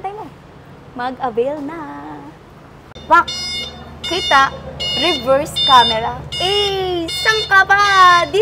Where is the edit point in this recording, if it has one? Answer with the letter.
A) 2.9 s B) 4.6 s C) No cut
A